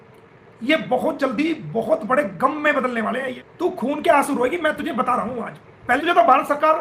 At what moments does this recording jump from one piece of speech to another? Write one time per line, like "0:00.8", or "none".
0:03.4
0:06.0

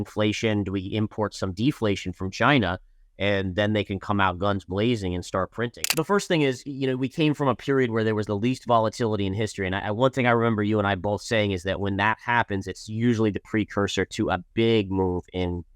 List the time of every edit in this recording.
0:05.8

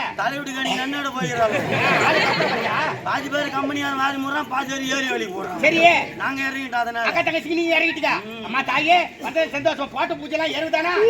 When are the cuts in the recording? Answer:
none

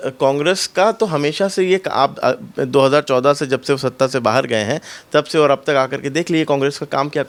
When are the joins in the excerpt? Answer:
none

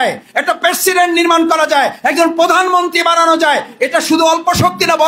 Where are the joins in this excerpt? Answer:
none

